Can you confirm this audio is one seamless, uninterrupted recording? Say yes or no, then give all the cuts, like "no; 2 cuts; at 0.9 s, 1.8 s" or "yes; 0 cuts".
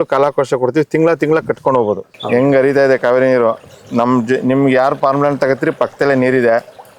no; 1 cut; at 2.1 s